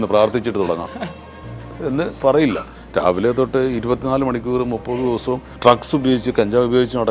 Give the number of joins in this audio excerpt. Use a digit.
2